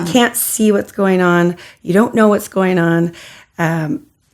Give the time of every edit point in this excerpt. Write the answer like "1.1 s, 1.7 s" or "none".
none